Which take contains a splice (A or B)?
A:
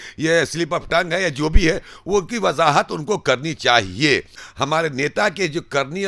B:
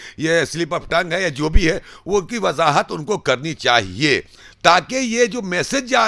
A